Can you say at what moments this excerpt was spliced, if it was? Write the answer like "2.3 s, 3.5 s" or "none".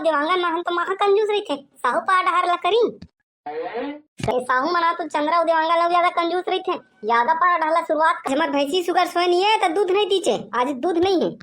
4.3 s, 8.2 s